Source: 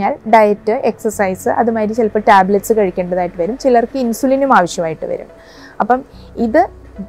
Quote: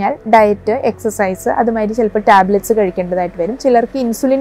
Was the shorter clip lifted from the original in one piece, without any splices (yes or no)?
yes